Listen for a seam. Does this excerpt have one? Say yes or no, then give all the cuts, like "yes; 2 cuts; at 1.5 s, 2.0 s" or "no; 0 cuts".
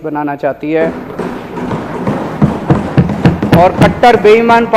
no; 0 cuts